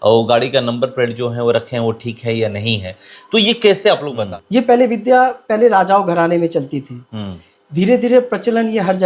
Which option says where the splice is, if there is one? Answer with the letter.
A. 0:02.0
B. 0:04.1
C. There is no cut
B